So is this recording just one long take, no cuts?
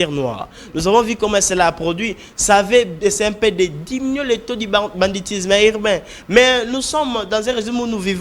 yes; 0 cuts

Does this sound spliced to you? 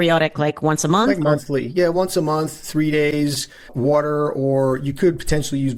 no; 0 cuts

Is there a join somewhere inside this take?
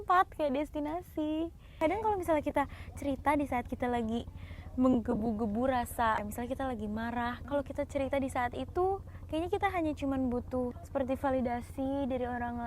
yes; 4 cuts; at 1.6 s, 6.2 s, 7.4 s, 10.8 s

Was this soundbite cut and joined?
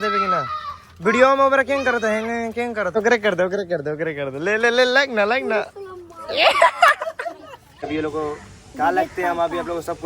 yes; 2 cuts; at 3.0 s, 7.8 s

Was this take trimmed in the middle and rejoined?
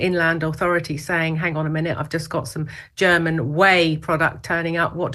no; 0 cuts

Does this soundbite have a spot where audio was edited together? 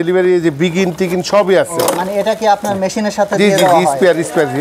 no; 0 cuts

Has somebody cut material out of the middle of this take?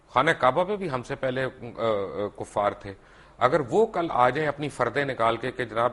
no; 0 cuts

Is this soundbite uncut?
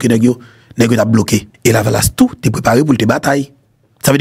no; 1 cut; at 1.5 s

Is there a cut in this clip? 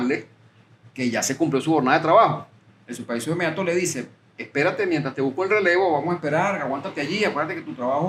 no; 0 cuts

